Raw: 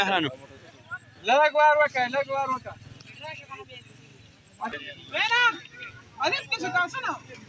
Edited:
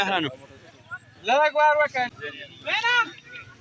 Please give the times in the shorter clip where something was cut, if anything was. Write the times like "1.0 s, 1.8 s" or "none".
1.9 s